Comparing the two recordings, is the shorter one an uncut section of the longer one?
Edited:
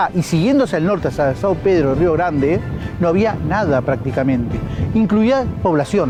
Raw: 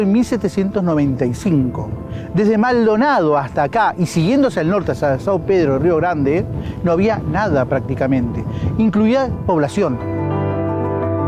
yes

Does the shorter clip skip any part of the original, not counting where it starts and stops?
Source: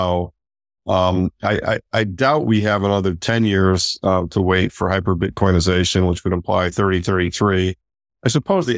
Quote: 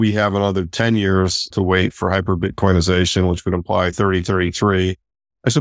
yes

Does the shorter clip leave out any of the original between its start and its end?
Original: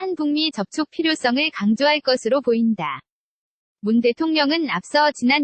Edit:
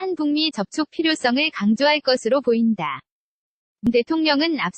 yes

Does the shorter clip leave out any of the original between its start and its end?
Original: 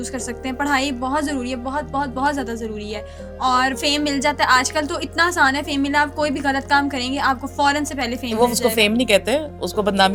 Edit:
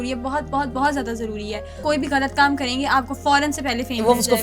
yes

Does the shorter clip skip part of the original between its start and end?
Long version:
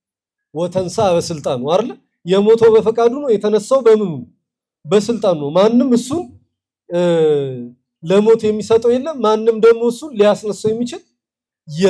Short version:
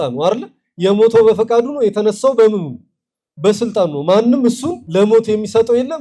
yes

